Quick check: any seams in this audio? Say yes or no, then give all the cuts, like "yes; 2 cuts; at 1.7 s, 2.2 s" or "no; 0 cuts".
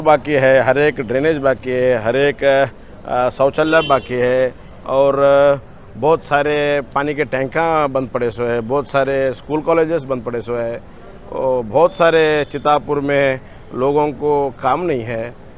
no; 0 cuts